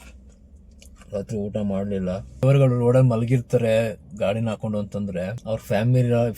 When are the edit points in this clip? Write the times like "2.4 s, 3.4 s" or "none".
2.4 s, 5.4 s